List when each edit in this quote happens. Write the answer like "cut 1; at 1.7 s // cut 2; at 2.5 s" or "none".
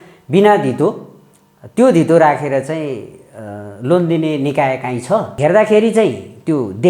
cut 1; at 5.3 s